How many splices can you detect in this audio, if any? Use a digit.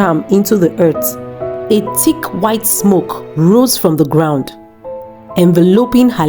1